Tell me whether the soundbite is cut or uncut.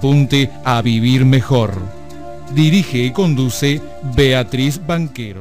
uncut